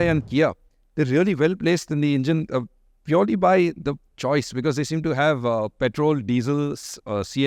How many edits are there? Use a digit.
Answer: 0